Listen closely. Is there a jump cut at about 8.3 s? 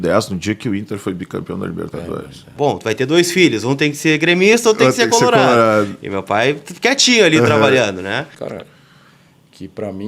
yes; 2 cuts; at 2.5 s, 8.3 s

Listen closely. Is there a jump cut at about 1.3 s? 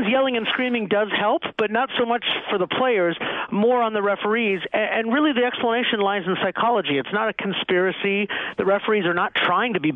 no; 0 cuts

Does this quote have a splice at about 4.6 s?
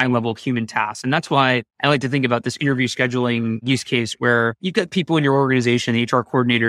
yes; 3 cuts; at 1.7 s, 3.6 s, 4.6 s

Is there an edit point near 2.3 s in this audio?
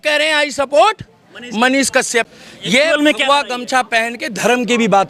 yes; 1 cut; at 2.3 s

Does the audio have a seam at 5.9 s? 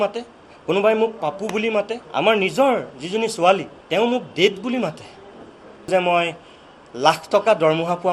yes; 3 cuts; at 2.0 s, 3.7 s, 5.9 s

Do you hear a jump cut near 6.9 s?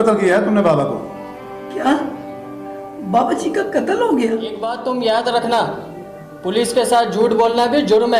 no; 1 cut; at 4.7 s

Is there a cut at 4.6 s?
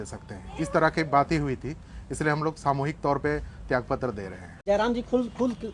yes; 1 cut; at 4.6 s

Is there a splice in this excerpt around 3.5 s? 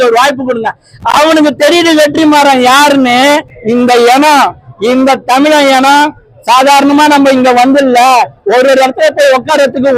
yes; 1 cut; at 3.5 s

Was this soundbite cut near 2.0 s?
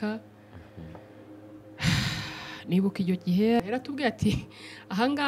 no; 1 cut; at 3.6 s

